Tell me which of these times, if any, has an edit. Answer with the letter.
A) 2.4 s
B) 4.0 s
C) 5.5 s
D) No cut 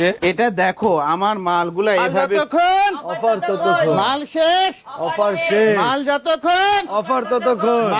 A